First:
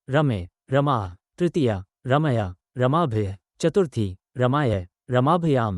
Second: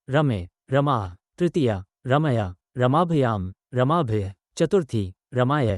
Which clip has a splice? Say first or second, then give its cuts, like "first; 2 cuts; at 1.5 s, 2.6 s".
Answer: first; 1 cut; at 2.6 s